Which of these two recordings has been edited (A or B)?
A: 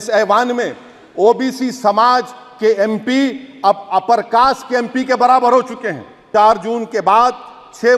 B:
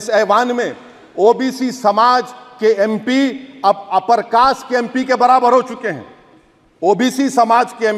A